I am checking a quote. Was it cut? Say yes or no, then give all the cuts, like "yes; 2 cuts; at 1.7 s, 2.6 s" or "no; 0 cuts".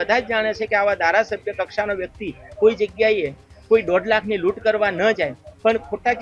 no; 0 cuts